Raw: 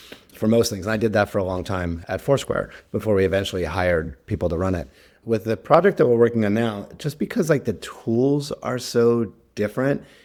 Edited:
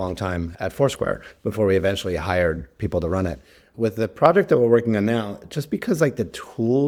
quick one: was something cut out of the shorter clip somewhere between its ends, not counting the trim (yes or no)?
no